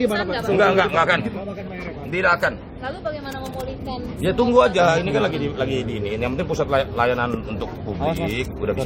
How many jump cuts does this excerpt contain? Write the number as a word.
zero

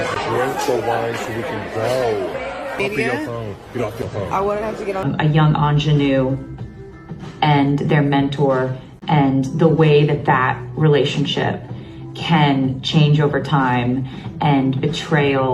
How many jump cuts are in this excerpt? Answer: two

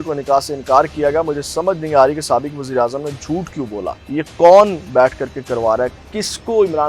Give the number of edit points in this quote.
one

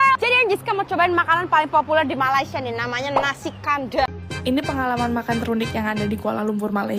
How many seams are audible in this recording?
one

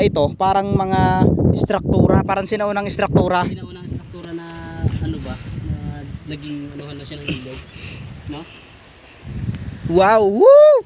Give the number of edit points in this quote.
zero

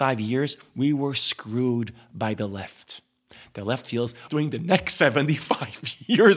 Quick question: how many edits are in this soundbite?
one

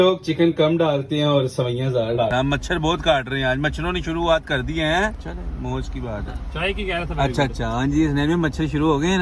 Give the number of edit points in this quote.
two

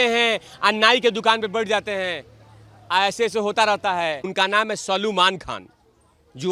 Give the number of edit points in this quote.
one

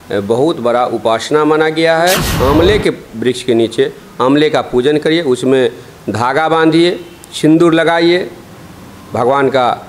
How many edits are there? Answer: one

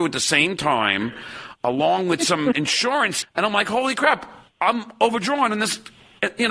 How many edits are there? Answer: one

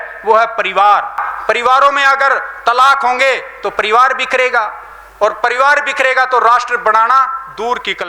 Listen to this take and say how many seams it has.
one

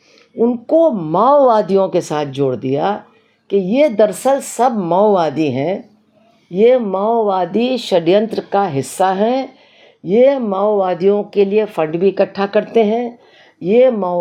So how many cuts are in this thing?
zero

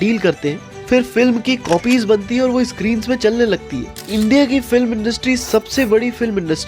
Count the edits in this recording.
one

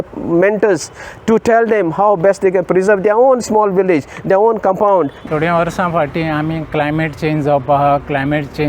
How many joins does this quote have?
one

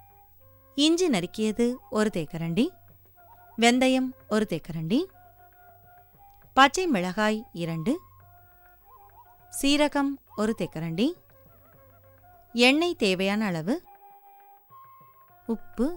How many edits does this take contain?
two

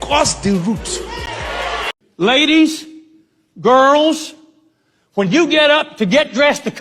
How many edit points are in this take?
one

